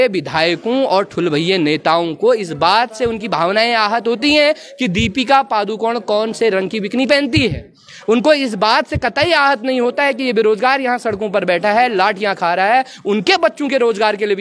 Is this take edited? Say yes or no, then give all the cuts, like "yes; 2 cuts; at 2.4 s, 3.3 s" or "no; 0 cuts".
no; 0 cuts